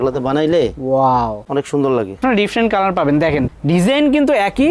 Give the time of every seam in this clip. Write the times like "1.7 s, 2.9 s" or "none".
2.2 s